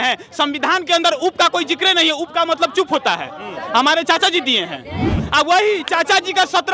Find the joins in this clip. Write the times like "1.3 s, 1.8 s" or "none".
5.2 s